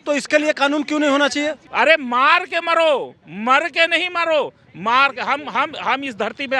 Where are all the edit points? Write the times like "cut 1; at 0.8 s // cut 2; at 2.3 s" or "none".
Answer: cut 1; at 1.6 s